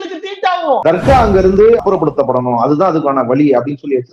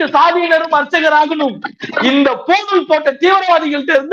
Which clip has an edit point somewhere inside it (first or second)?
first